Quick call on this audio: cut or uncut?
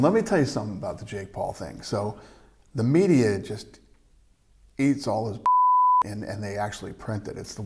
uncut